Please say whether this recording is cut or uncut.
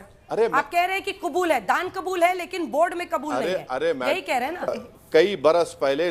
cut